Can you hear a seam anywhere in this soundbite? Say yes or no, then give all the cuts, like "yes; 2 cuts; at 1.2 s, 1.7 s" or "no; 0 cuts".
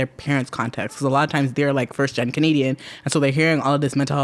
no; 0 cuts